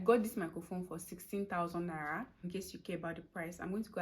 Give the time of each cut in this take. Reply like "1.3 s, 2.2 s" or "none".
2.4 s